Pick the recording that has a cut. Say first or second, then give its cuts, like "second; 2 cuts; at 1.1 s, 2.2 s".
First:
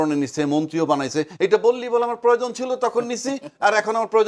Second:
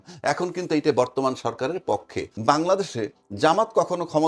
second; 1 cut; at 2.3 s